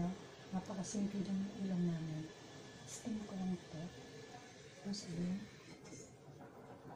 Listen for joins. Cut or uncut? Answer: uncut